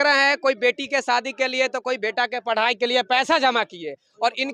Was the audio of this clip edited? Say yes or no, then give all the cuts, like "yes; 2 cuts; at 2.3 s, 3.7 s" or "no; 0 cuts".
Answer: no; 0 cuts